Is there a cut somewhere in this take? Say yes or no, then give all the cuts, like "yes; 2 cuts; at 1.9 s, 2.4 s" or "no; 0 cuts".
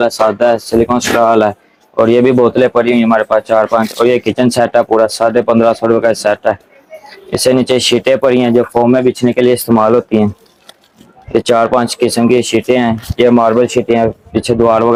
no; 0 cuts